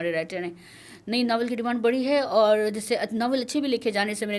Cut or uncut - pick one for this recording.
uncut